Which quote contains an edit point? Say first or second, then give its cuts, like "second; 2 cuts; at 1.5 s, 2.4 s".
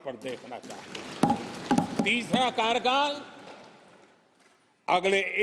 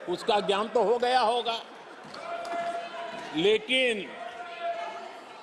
first; 1 cut; at 1.9 s